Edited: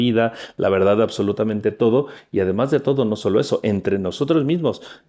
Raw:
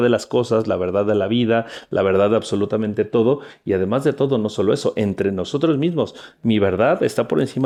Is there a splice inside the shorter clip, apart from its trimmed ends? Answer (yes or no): no